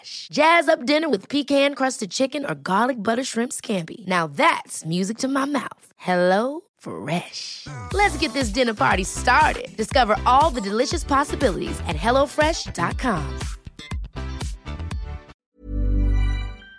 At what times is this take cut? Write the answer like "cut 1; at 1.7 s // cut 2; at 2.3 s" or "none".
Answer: cut 1; at 15.3 s

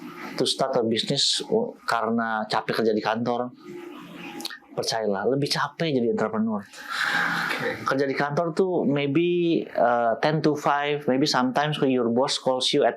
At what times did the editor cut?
none

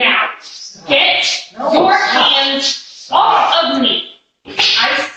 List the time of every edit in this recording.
none

